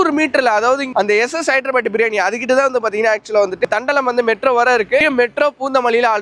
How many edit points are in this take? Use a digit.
3